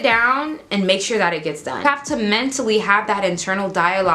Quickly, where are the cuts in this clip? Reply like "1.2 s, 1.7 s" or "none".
1.9 s